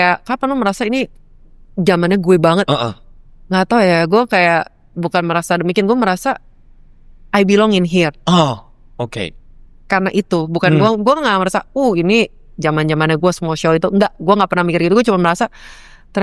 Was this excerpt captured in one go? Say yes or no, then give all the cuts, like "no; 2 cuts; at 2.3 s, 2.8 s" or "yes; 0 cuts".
yes; 0 cuts